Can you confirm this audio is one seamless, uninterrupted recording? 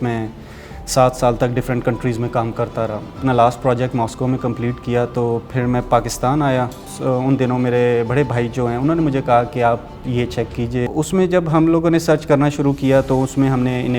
no; 3 cuts; at 3.2 s, 6.9 s, 10.9 s

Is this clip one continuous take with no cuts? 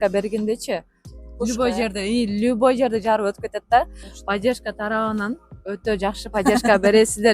no; 1 cut; at 4.1 s

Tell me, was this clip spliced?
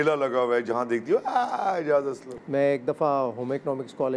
yes; 1 cut; at 2.2 s

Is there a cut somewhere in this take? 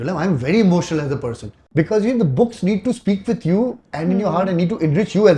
yes; 1 cut; at 1.6 s

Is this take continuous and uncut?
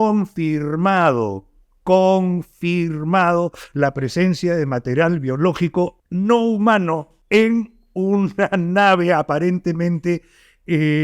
no; 2 cuts; at 6.0 s, 7.1 s

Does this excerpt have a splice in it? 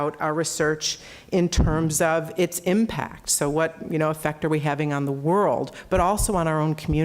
yes; 1 cut; at 3.5 s

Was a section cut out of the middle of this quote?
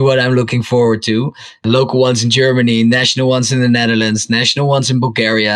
yes; 1 cut; at 1.6 s

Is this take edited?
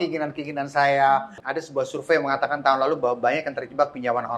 yes; 1 cut; at 1.4 s

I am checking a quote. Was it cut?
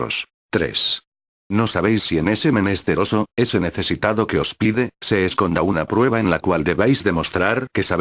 yes; 1 cut; at 3.6 s

